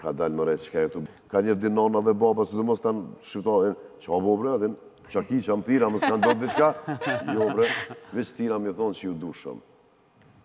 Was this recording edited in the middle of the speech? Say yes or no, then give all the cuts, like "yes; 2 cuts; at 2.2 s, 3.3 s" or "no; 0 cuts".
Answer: yes; 1 cut; at 1.0 s